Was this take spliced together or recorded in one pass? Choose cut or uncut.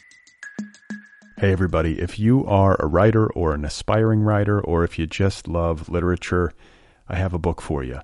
cut